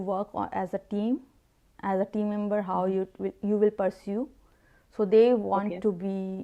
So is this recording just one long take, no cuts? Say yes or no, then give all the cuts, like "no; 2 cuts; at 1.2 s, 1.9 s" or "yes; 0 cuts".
yes; 0 cuts